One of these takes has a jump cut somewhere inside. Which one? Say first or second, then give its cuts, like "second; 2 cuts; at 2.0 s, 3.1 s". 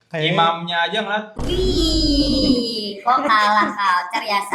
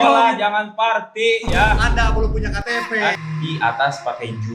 second; 1 cut; at 3.2 s